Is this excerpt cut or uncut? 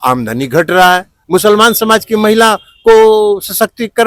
cut